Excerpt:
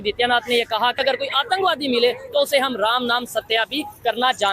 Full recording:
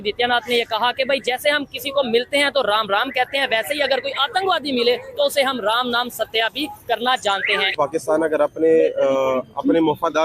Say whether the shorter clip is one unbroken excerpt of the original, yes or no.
no